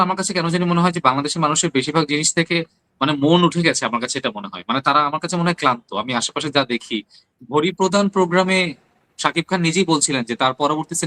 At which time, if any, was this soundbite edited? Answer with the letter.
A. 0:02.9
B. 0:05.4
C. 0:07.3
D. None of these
C